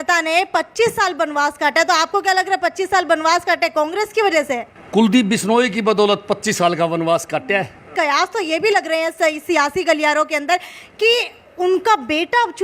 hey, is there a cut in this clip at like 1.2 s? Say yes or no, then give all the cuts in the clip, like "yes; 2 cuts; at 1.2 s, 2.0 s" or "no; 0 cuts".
no; 2 cuts; at 4.7 s, 7.9 s